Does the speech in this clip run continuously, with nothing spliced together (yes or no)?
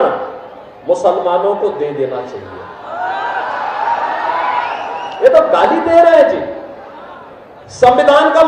yes